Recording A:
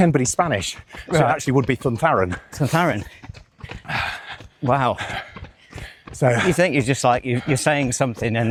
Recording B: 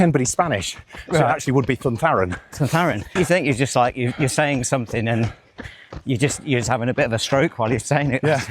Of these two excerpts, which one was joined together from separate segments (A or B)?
B